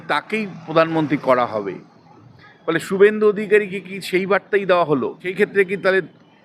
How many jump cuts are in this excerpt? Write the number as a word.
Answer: one